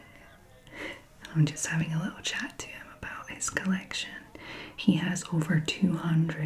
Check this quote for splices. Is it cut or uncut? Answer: uncut